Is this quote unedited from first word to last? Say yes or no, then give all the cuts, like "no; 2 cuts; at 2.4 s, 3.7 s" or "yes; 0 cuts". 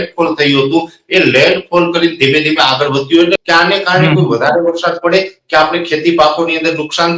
no; 1 cut; at 3.3 s